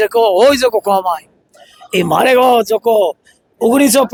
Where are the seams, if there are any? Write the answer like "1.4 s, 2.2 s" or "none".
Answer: none